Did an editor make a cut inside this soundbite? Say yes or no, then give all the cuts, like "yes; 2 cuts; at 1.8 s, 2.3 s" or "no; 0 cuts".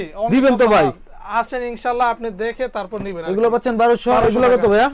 no; 0 cuts